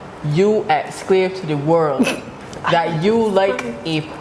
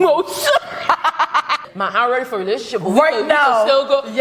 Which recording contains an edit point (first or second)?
second